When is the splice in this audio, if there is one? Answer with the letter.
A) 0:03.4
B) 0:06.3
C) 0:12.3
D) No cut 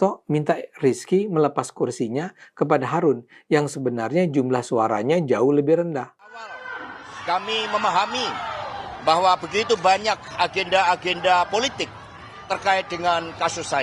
B